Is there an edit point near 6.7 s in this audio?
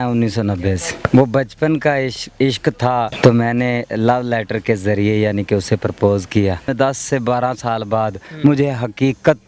yes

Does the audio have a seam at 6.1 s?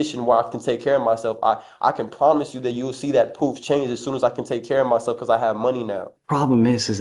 yes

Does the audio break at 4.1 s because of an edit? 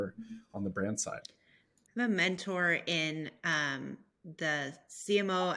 no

